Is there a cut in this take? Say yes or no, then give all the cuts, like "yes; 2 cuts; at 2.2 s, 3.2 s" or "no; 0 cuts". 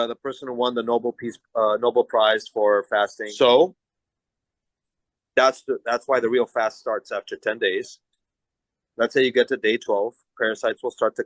yes; 1 cut; at 3.2 s